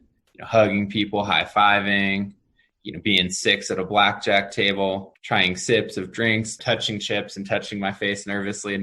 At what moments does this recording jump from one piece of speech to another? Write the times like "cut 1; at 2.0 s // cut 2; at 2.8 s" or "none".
cut 1; at 6.6 s